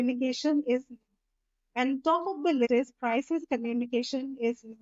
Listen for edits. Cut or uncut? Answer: cut